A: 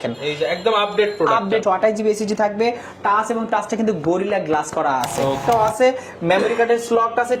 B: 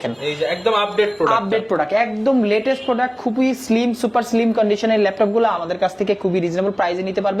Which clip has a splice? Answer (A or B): A